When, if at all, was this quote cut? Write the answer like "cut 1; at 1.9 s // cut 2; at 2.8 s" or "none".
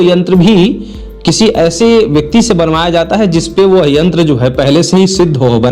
none